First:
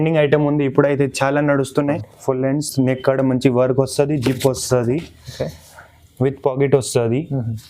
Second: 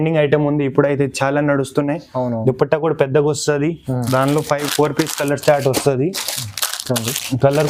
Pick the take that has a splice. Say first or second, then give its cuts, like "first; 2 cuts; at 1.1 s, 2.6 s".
first; 1 cut; at 2.1 s